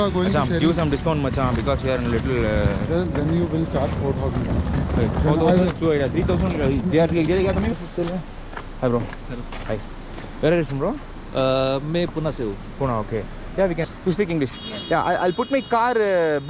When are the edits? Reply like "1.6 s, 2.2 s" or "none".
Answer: 7.7 s, 13.9 s